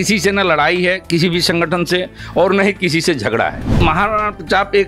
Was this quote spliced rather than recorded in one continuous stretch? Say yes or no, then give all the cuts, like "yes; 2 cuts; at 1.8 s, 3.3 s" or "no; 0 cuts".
yes; 1 cut; at 3.8 s